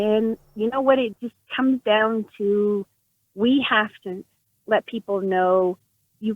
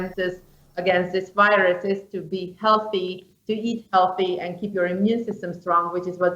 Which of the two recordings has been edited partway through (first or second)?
first